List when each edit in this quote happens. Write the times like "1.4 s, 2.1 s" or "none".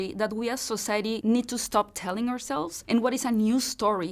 1.2 s